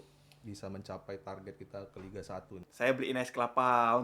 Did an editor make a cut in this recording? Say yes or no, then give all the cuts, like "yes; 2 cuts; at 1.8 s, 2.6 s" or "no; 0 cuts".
yes; 1 cut; at 2.6 s